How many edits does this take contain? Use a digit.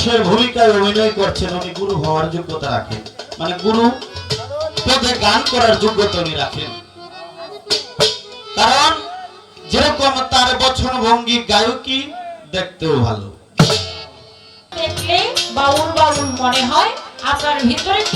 1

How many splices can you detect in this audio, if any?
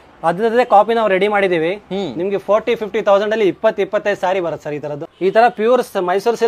1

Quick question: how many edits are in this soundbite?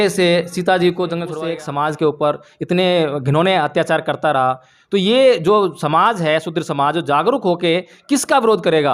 1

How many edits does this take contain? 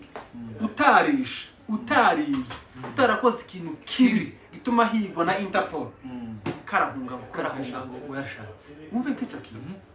0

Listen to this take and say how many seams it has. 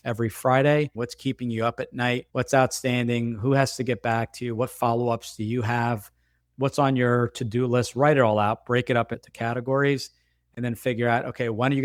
0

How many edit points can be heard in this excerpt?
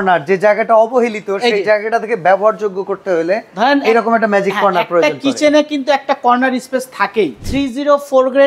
1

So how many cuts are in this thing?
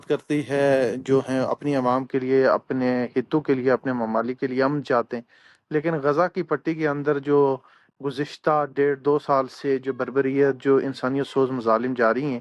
0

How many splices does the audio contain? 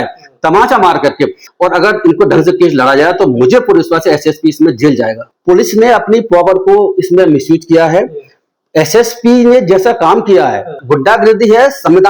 3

